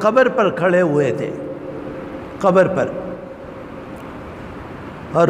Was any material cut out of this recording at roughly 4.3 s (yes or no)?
no